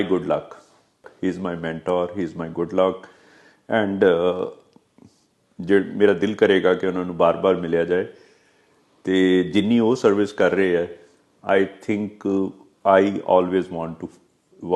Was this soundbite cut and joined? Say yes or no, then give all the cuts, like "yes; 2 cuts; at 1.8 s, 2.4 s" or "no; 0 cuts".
yes; 1 cut; at 1.1 s